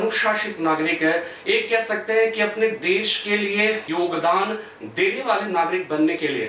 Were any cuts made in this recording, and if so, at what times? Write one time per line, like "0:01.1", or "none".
0:03.9